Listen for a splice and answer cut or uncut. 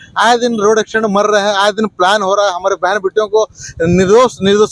uncut